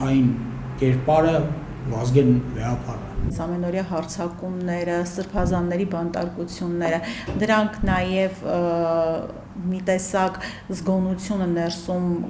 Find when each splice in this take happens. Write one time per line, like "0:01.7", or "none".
0:03.3